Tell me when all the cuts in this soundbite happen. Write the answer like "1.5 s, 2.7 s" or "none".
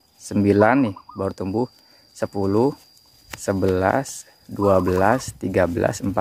none